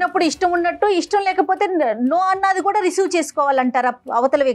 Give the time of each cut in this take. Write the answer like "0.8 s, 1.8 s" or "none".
none